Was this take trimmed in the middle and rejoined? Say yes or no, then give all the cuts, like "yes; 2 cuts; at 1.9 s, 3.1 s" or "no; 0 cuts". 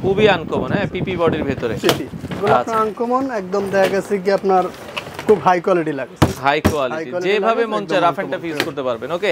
no; 0 cuts